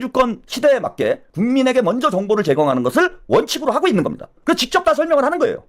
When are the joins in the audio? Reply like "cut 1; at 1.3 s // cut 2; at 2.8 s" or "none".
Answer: cut 1; at 1.3 s // cut 2; at 4.3 s

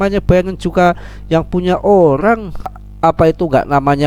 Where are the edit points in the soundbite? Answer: cut 1; at 2.8 s

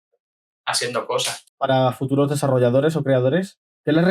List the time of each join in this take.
cut 1; at 1.4 s

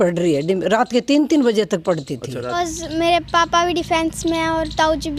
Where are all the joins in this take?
cut 1; at 2.5 s

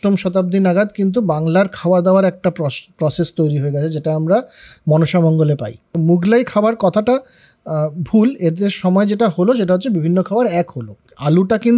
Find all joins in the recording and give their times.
cut 1; at 5.8 s // cut 2; at 10.9 s

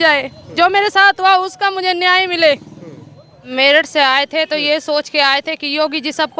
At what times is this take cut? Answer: cut 1; at 3.5 s

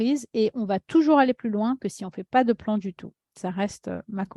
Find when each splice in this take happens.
none

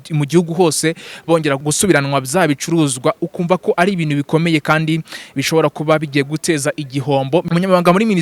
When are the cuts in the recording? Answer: cut 1; at 1.6 s // cut 2; at 7.5 s

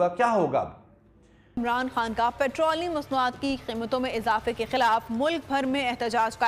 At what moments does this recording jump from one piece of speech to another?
cut 1; at 1.5 s

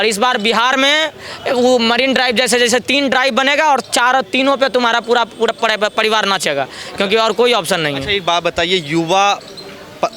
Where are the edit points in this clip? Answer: none

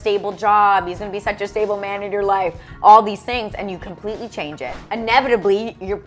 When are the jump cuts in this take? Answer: cut 1; at 4.8 s

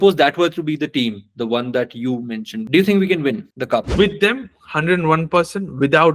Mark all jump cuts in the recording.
cut 1; at 2.5 s

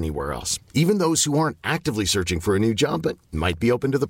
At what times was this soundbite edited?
none

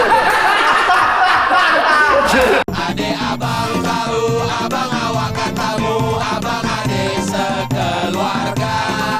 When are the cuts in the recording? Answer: cut 1; at 2.6 s

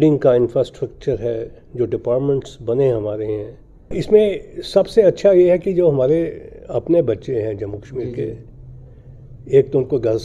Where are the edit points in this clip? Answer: cut 1; at 4.0 s

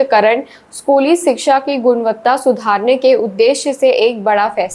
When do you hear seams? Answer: none

